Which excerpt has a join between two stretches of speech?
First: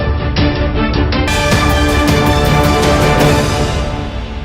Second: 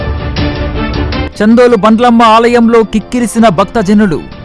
first; 1 cut; at 1.0 s

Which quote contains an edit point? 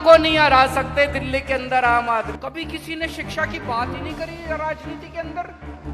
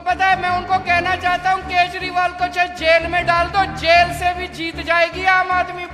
first; 1 cut; at 2.3 s

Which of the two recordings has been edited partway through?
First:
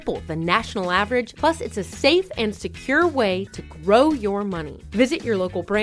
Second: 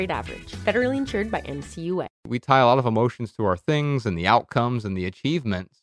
second; 1 cut; at 2.3 s

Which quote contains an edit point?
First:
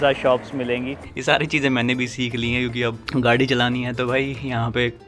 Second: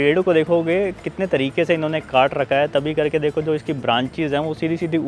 first; 2 cuts; at 1.0 s, 3.0 s

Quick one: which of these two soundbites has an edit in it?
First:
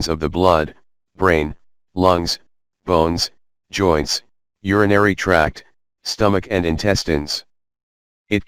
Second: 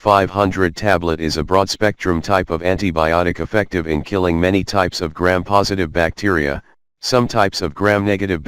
second; 1 cut; at 1.0 s

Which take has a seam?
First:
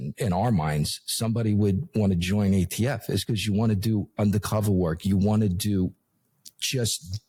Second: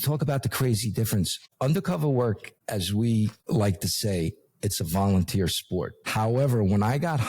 second; 4 cuts; at 1.4 s, 2.5 s, 3.4 s, 6.0 s

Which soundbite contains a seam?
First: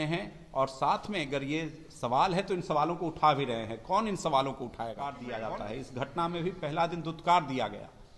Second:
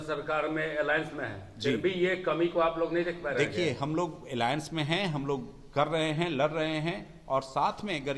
first; 1 cut; at 5.2 s

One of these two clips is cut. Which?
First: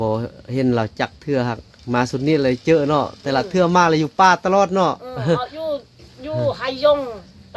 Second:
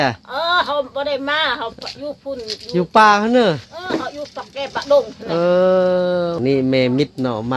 second; 1 cut; at 6.4 s

